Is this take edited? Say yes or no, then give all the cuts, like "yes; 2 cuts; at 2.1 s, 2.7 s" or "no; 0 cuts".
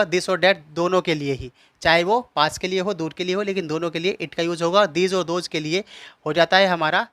no; 0 cuts